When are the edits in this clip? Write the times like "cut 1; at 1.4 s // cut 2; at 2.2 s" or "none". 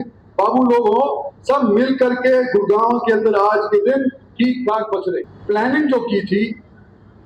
cut 1; at 5.3 s